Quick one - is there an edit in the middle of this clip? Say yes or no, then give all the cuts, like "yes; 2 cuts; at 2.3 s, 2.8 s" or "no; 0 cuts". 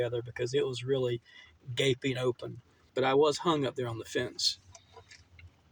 yes; 1 cut; at 2.8 s